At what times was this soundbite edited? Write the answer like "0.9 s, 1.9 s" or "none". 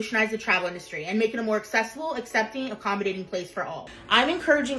3.9 s